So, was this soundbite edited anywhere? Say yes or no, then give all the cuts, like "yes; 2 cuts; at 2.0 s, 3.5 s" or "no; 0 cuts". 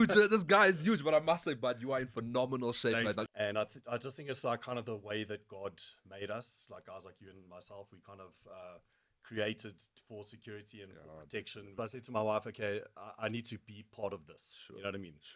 yes; 2 cuts; at 3.3 s, 11.7 s